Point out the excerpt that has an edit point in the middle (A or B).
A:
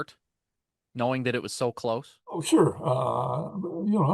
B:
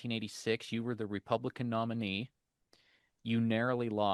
A